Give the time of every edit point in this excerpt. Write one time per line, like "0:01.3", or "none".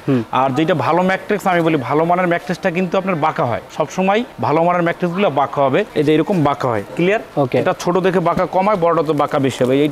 0:05.9